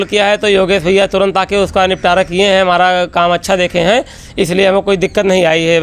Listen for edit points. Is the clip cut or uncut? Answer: uncut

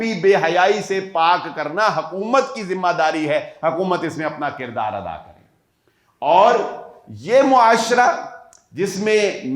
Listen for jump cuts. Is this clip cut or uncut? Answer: uncut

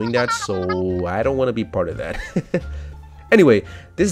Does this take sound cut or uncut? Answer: uncut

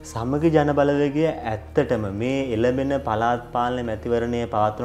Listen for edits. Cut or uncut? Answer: uncut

